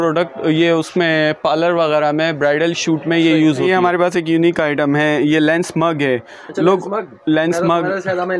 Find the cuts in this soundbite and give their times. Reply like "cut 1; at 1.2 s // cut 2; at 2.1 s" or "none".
cut 1; at 3.7 s